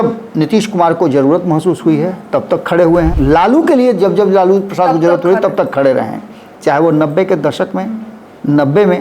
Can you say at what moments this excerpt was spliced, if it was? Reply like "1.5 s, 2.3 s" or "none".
3.1 s